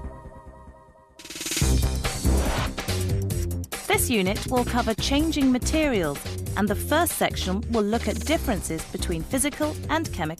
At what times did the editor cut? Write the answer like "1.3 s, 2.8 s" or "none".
1.0 s, 8.8 s